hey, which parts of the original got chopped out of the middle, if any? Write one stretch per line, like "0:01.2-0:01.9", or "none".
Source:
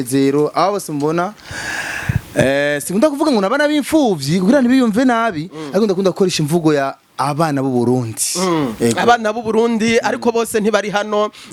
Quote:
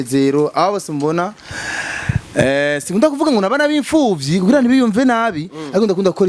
none